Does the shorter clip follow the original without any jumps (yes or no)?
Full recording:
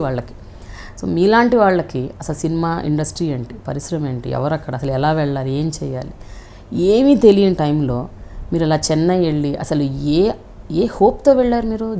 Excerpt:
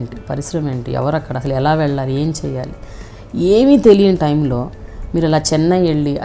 yes